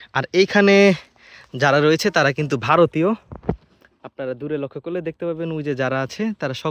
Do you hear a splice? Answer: no; 0 cuts

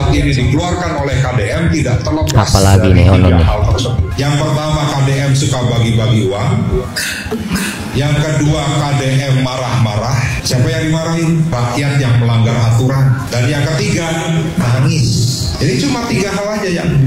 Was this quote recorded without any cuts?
yes; 0 cuts

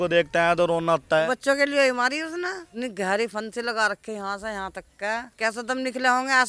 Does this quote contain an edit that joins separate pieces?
yes; 3 cuts; at 1.3 s, 2.6 s, 5.3 s

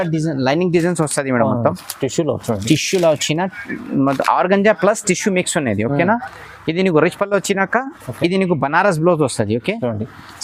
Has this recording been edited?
no; 0 cuts

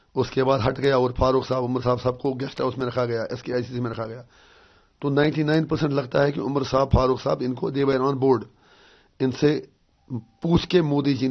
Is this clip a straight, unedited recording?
yes; 0 cuts

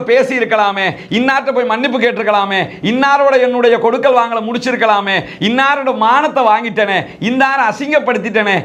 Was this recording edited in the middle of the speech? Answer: no; 0 cuts

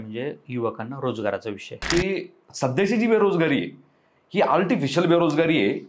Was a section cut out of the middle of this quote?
yes; 1 cut; at 1.7 s

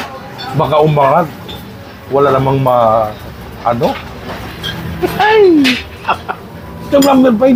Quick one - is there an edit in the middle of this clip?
no; 0 cuts

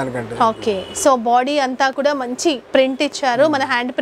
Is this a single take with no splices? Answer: no; 1 cut; at 2.6 s

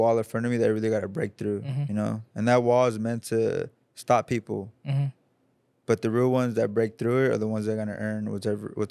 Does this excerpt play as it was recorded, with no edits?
yes; 0 cuts

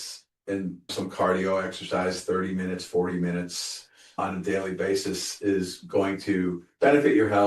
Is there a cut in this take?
yes; 1 cut; at 0.9 s

